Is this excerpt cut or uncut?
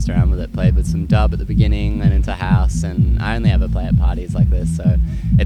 uncut